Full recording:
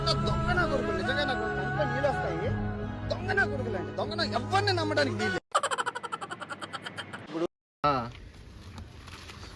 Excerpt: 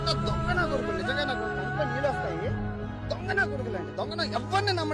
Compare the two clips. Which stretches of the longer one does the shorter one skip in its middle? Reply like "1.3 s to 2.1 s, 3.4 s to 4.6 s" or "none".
none